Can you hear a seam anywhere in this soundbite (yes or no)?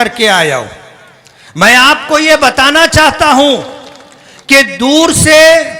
no